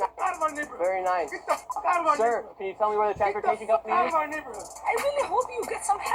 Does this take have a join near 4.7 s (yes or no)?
yes